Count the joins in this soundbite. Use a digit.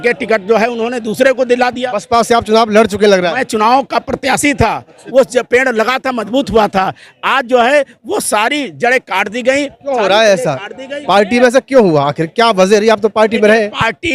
1